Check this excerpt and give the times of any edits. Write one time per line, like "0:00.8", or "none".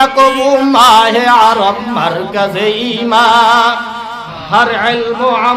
0:04.3